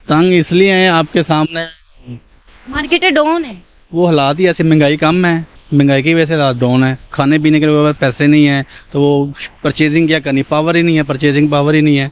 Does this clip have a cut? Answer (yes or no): no